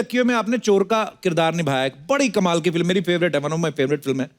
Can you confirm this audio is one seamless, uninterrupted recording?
yes; 0 cuts

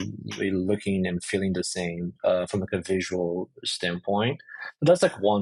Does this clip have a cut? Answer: no; 0 cuts

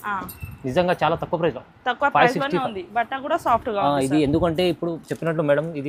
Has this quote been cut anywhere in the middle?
no; 0 cuts

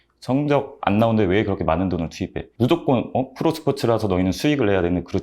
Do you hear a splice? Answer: yes; 1 cut; at 2.5 s

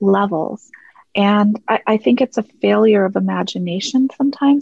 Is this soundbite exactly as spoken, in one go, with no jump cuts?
yes; 0 cuts

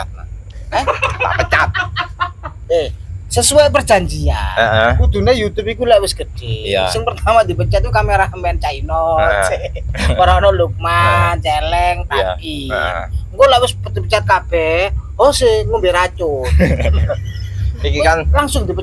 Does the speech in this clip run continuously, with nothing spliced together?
yes; 0 cuts

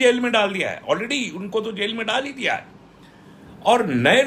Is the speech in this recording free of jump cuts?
yes; 0 cuts

